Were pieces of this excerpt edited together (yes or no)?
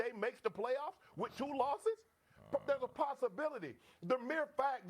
yes